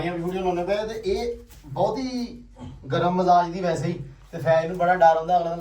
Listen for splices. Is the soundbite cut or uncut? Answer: uncut